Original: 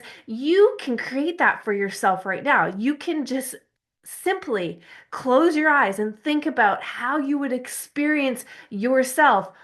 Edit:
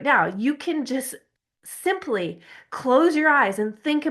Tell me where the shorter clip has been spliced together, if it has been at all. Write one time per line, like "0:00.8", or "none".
none